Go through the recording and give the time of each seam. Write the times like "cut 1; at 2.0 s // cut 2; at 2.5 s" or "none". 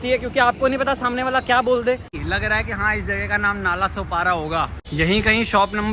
cut 1; at 2.1 s // cut 2; at 4.9 s